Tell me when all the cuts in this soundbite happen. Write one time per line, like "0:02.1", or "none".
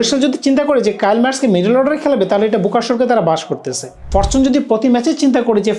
0:03.9